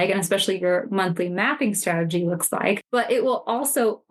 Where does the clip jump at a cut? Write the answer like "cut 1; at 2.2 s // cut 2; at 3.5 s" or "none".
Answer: cut 1; at 2.9 s